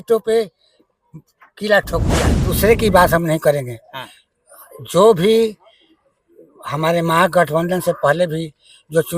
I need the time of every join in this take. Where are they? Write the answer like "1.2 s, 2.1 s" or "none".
2.4 s